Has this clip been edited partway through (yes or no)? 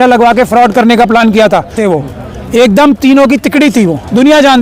yes